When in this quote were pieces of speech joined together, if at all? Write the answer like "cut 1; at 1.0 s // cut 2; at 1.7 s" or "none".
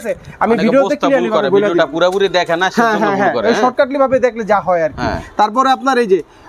none